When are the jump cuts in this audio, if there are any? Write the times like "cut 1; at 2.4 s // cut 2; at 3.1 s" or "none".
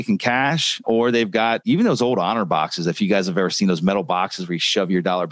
none

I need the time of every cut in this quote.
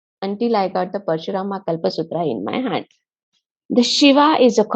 cut 1; at 3.5 s

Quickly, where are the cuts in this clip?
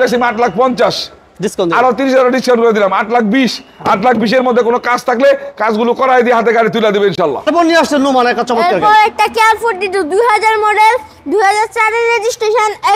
none

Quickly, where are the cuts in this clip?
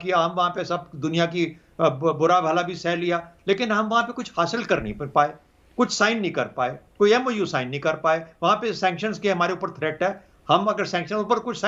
none

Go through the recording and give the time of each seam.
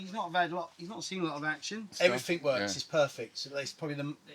cut 1; at 1.9 s

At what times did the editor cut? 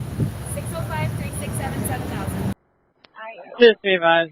cut 1; at 2.5 s

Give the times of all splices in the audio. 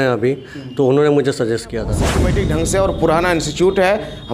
cut 1; at 2.2 s

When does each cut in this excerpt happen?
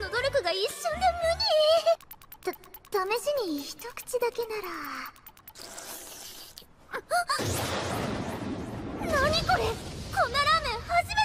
cut 1; at 6.4 s

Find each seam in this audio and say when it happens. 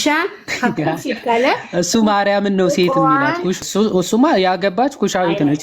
cut 1; at 3.6 s

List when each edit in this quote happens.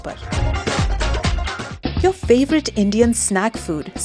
cut 1; at 1.6 s

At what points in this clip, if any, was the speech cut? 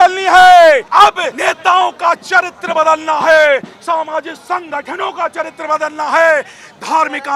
cut 1; at 1.0 s

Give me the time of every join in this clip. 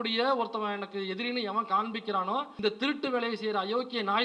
cut 1; at 2.5 s

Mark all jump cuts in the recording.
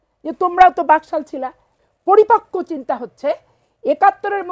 cut 1; at 1.7 s

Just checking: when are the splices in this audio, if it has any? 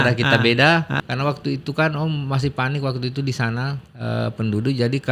cut 1; at 0.9 s

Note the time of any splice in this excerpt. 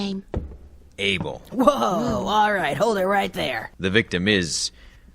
cut 1; at 3.7 s

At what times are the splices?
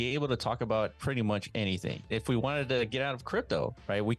cut 1; at 2.1 s

